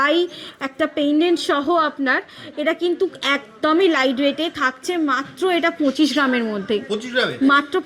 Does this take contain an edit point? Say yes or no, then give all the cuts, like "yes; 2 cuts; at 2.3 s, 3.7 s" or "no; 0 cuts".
no; 0 cuts